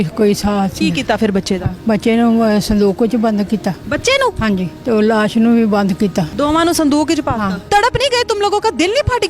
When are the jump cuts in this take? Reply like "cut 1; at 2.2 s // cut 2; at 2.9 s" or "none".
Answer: cut 1; at 1.7 s // cut 2; at 4.4 s // cut 3; at 6.3 s // cut 4; at 7.6 s

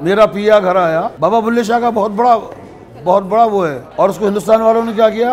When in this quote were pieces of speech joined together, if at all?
cut 1; at 1.1 s // cut 2; at 3.8 s

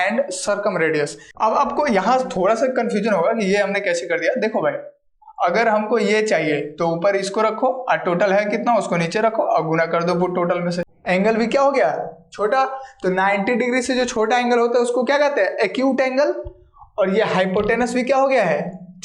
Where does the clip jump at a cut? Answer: cut 1; at 1.2 s // cut 2; at 10.9 s

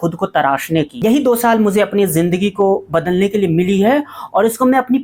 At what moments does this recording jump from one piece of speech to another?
cut 1; at 0.9 s

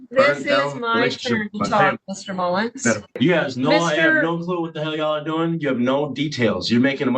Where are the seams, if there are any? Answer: cut 1; at 3.2 s

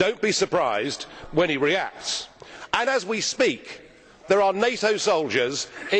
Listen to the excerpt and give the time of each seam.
cut 1; at 2.5 s

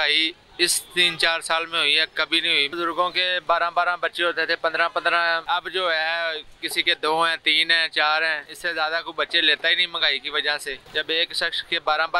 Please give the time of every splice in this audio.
cut 1; at 2.7 s // cut 2; at 5.4 s // cut 3; at 8.5 s // cut 4; at 10.8 s

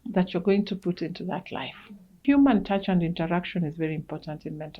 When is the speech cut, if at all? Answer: cut 1; at 2.2 s

